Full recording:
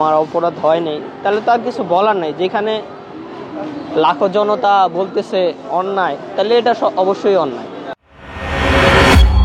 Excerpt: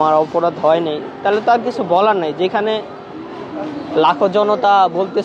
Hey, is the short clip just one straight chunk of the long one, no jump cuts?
yes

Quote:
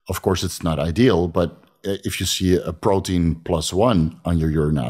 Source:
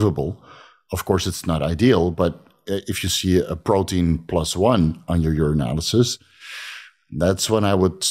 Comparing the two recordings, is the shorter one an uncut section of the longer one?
yes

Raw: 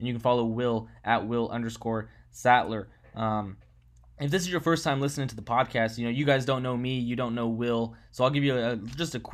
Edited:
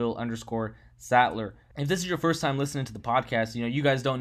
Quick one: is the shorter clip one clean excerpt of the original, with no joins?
no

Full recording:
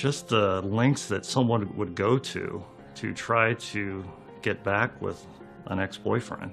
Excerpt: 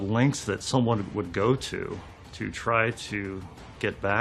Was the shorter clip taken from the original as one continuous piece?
yes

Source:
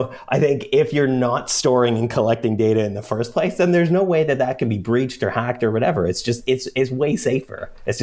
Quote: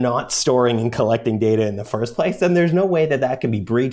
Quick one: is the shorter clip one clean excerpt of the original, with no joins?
yes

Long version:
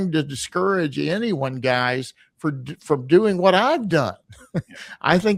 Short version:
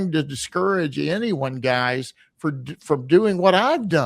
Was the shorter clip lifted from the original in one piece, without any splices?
yes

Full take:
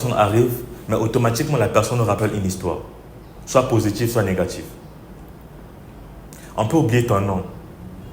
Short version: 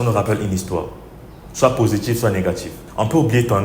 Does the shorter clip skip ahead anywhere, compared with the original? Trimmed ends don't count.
yes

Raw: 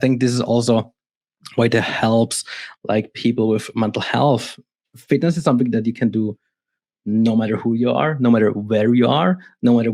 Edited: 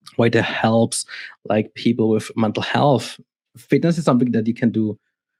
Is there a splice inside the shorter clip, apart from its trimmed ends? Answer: no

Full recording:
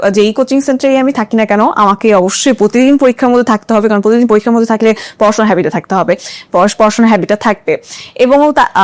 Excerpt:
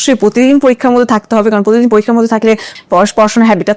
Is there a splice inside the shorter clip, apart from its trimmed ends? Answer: yes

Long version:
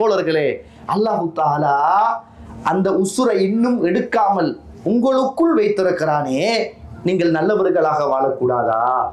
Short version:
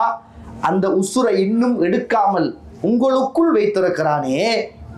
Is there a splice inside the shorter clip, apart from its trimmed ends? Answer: no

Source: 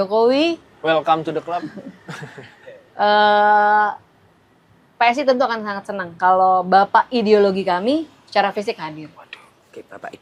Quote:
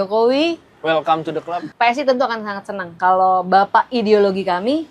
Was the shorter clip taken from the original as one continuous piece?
no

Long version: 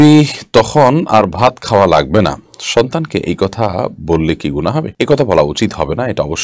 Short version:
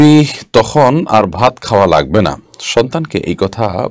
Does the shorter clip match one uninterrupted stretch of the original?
yes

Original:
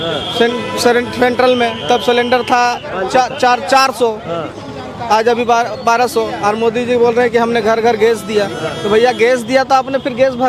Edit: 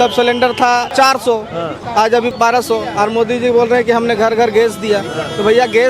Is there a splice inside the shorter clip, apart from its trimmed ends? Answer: yes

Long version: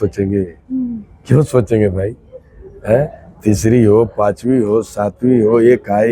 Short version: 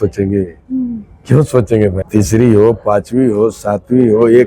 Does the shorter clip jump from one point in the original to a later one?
yes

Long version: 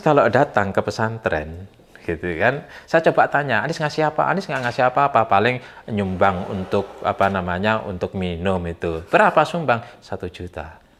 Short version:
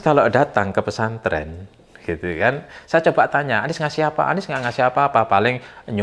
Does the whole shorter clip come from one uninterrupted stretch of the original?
yes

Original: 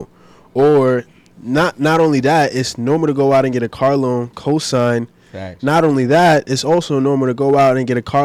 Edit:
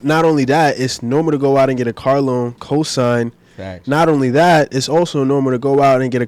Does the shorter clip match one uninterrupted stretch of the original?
yes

